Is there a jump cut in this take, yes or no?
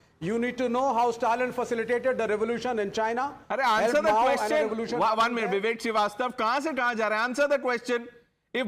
no